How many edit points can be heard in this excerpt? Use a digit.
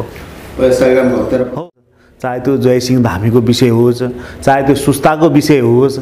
1